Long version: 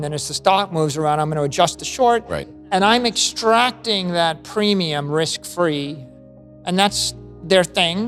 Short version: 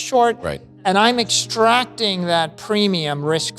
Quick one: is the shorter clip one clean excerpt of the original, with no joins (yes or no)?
yes